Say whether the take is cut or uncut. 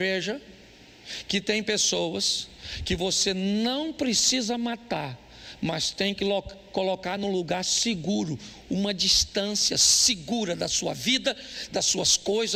uncut